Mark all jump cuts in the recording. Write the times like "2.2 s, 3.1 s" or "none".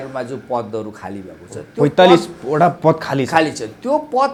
none

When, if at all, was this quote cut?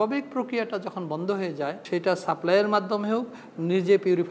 1.8 s

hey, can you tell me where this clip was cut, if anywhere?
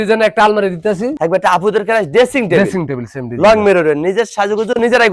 none

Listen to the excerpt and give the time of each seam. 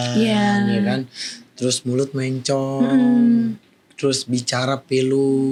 none

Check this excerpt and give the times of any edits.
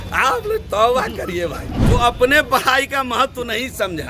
1.7 s

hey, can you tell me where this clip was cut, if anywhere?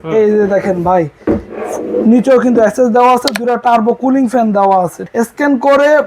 5.0 s

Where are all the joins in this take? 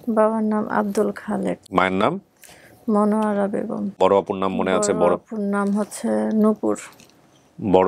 1.6 s, 4.0 s

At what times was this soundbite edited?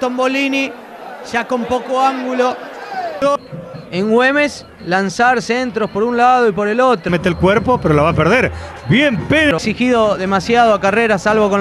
3.2 s, 7.1 s, 9.6 s

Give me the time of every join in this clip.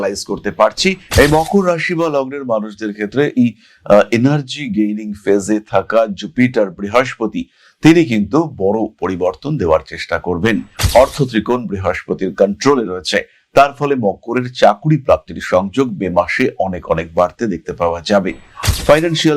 1.1 s, 10.8 s

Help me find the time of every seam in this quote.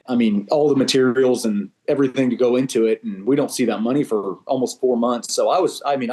none

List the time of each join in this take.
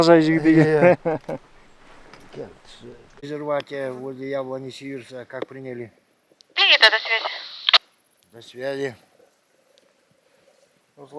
3.1 s

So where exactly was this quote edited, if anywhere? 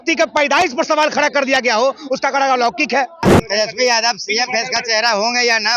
3.3 s

